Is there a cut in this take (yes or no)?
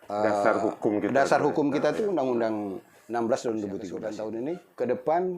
yes